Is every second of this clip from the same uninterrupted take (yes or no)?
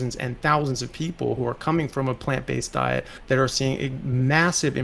no